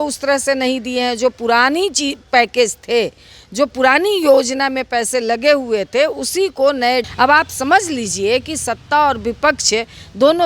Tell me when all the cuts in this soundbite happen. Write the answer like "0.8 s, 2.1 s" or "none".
7.1 s